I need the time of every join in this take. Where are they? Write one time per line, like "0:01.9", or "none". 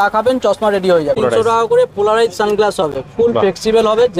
0:01.2